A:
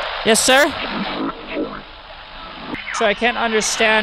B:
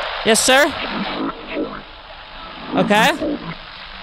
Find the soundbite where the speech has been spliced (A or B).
A